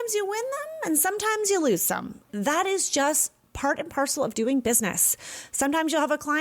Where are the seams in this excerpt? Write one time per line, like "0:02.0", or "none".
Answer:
0:02.3